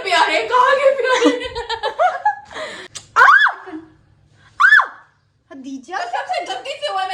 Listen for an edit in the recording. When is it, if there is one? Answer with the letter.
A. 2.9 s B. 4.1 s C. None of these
A